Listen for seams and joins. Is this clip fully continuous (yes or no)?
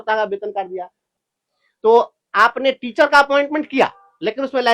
no